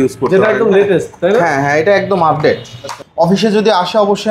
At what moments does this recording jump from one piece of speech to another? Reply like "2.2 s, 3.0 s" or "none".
3.0 s

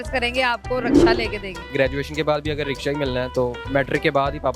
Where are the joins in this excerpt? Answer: 1.7 s

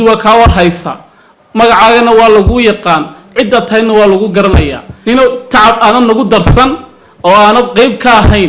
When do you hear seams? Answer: 4.9 s

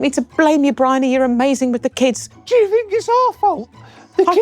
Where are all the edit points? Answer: 2.4 s

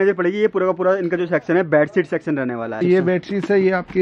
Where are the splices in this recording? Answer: 2.8 s

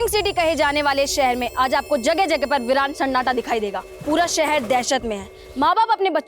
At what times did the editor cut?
3.9 s

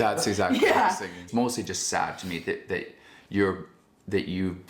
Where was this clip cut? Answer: 1.3 s

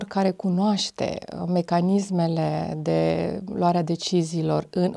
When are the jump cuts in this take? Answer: none

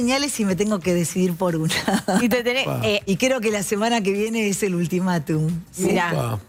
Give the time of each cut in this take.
none

